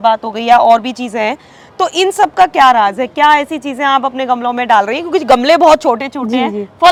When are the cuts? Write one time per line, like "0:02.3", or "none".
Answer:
none